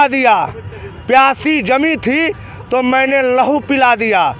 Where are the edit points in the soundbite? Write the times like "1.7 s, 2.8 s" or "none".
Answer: none